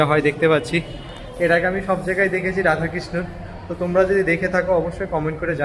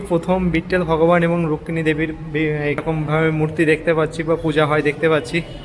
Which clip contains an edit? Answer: second; 1 cut; at 2.8 s

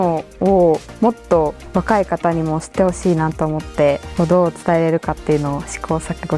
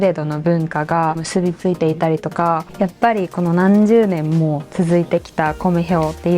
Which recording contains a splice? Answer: second; 2 cuts; at 1.2 s, 2.6 s

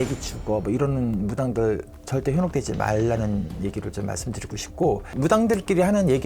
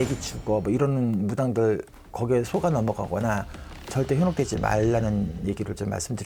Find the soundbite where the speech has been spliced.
first; 2 cuts; at 1.9 s, 5.2 s

